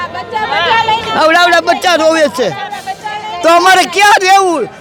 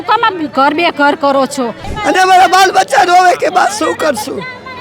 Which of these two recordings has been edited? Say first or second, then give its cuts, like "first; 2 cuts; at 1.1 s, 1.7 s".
second; 1 cut; at 1.9 s